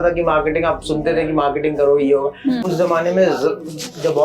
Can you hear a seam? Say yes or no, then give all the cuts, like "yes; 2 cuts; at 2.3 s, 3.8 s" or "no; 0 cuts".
yes; 1 cut; at 2.7 s